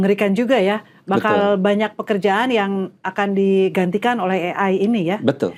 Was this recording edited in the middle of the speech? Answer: no; 0 cuts

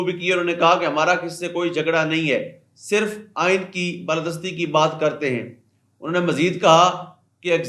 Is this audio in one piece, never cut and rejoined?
yes; 0 cuts

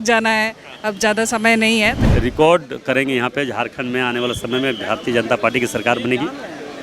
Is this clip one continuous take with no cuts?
no; 1 cut; at 2.0 s

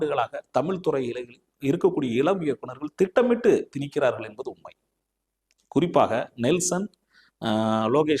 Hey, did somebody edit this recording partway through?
no; 0 cuts

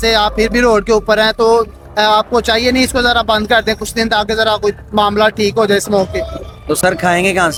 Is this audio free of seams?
yes; 0 cuts

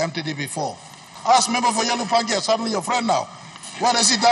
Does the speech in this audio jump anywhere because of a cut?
yes; 1 cut; at 1.1 s

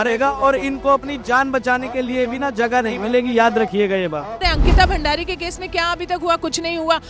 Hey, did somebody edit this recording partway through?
yes; 1 cut; at 4.4 s

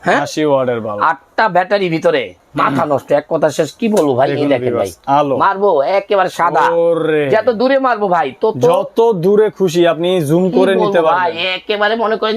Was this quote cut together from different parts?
yes; 1 cut; at 2.4 s

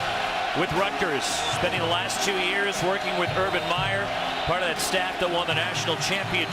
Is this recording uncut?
yes; 0 cuts

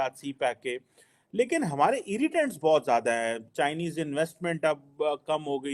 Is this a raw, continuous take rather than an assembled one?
yes; 0 cuts

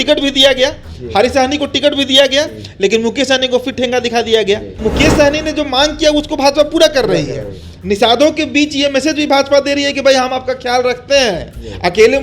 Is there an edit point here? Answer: yes; 1 cut; at 4.8 s

